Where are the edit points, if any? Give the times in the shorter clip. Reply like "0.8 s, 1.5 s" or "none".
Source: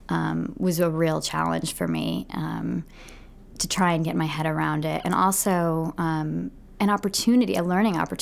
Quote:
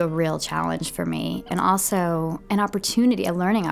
1.5 s, 2.4 s